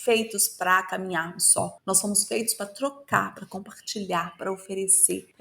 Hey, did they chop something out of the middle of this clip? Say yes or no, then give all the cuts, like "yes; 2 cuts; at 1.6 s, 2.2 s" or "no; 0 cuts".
no; 0 cuts